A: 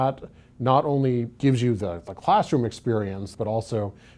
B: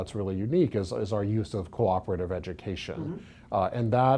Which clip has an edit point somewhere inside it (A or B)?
A